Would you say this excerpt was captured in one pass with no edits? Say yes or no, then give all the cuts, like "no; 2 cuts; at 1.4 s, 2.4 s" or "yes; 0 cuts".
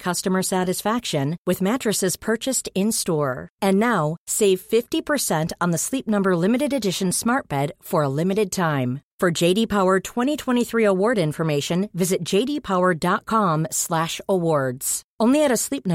yes; 0 cuts